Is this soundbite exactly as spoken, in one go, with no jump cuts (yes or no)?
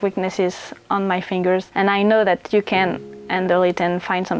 no